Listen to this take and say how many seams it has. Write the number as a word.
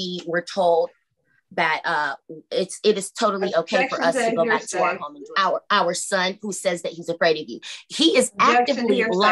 one